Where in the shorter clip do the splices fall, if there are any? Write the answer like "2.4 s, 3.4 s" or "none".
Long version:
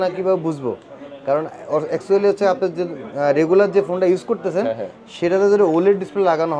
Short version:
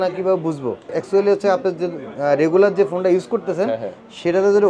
1.0 s